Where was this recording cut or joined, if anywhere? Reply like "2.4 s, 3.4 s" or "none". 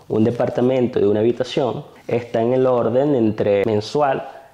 1.9 s, 3.6 s